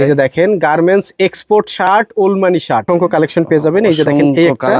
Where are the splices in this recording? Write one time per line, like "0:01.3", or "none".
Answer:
0:02.8